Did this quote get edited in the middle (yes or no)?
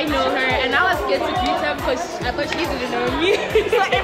no